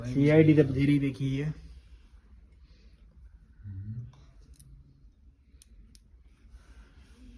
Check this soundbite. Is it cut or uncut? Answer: uncut